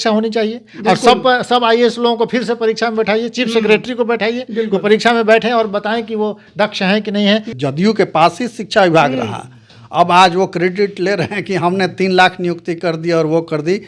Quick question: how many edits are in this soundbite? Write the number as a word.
one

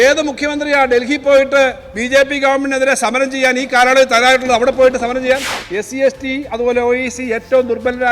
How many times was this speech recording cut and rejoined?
one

